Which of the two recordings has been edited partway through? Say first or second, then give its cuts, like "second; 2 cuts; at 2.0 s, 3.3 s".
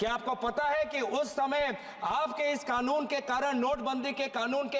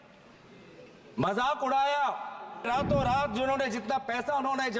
second; 1 cut; at 2.7 s